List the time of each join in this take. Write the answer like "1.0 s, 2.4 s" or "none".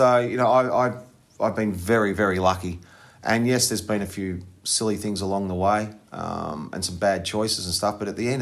none